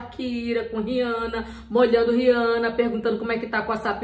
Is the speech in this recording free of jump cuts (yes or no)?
yes